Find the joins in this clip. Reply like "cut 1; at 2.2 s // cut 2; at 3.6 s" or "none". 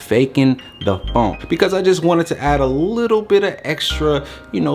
cut 1; at 1.4 s